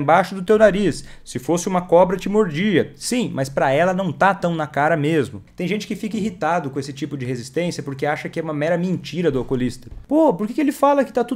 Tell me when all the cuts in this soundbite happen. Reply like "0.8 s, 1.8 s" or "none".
5.5 s, 9.9 s